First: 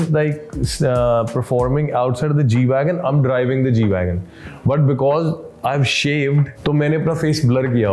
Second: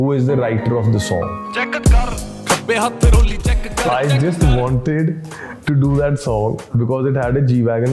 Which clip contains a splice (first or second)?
second